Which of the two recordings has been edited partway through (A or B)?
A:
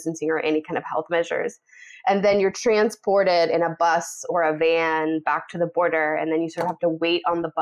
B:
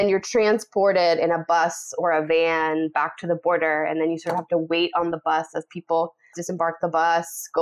B